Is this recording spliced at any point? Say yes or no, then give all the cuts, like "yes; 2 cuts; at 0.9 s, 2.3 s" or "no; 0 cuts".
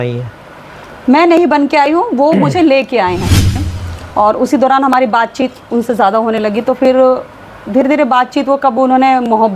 yes; 1 cut; at 3.6 s